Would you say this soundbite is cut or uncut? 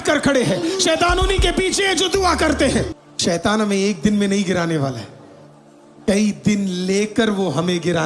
cut